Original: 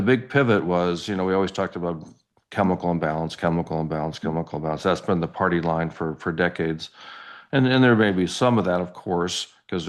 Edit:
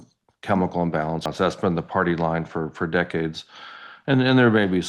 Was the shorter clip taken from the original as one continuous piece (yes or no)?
no